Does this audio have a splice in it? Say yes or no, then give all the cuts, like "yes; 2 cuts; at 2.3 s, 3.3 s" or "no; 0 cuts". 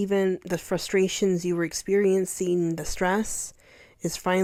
no; 0 cuts